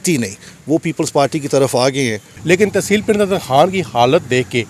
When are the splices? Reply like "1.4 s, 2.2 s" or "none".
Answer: 2.3 s

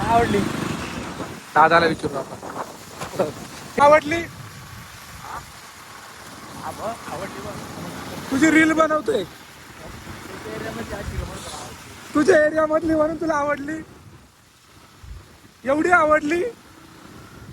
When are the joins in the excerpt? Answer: 3.8 s

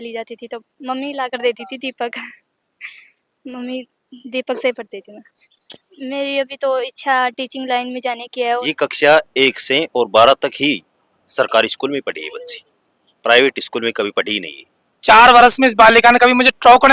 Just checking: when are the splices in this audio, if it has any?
5.5 s, 8.6 s, 15.0 s

